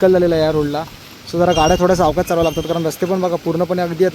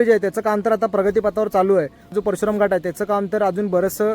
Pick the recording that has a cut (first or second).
second